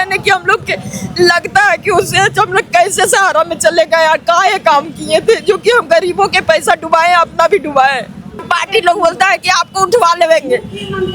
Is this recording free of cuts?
no; 1 cut; at 8.4 s

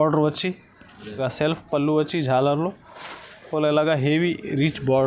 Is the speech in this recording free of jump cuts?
no; 1 cut; at 1.2 s

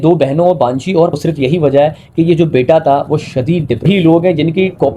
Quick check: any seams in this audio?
yes; 2 cuts; at 1.1 s, 3.8 s

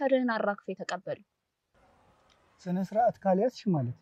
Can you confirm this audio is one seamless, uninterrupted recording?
yes; 0 cuts

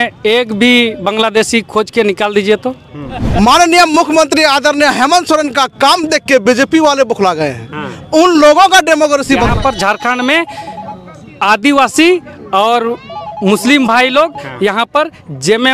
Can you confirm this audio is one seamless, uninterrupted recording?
no; 2 cuts; at 3.2 s, 9.5 s

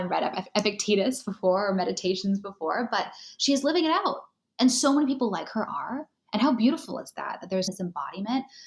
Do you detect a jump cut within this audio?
yes; 1 cut; at 7.7 s

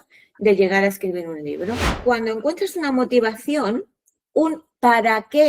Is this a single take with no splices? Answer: no; 1 cut; at 1.9 s

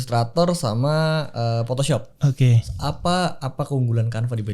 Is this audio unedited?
yes; 0 cuts

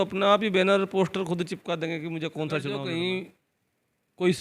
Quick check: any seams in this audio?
yes; 1 cut; at 2.7 s

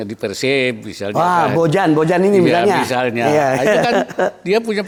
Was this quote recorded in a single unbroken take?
yes; 0 cuts

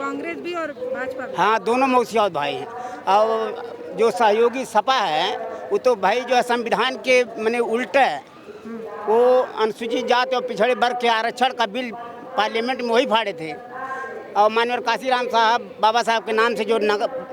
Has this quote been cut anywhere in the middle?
no; 0 cuts

